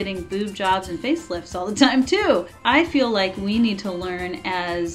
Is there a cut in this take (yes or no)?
no